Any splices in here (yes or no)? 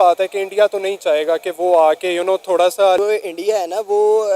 yes